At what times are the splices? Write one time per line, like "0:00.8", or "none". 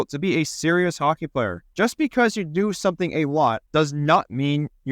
0:01.6
0:03.6